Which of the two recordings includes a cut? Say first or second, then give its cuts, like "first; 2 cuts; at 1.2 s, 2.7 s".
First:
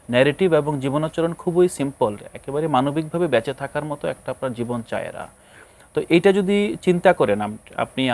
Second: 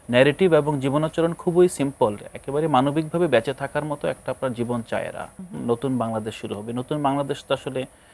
second; 1 cut; at 5.4 s